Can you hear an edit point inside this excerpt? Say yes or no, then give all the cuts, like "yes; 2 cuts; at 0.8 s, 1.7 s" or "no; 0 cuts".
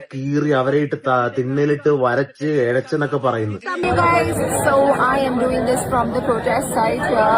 yes; 1 cut; at 3.8 s